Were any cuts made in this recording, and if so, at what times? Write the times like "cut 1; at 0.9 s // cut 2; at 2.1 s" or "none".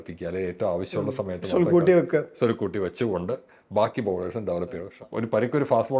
cut 1; at 4.9 s